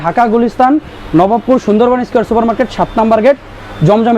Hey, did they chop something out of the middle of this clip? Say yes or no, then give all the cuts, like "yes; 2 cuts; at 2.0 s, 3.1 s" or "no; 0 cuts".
no; 0 cuts